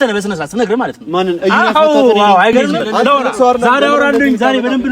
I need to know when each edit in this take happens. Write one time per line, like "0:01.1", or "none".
0:02.8